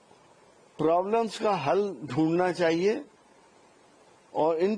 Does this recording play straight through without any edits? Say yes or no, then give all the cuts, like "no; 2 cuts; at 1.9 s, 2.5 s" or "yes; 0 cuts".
yes; 0 cuts